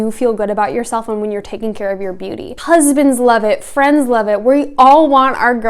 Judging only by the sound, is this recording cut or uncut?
cut